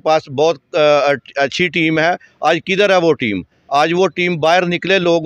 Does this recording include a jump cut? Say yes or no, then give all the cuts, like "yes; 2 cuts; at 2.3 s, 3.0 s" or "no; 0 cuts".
no; 0 cuts